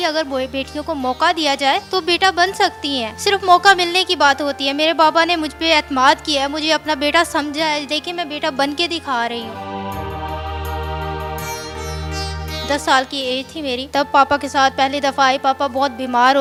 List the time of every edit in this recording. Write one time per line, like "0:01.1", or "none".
none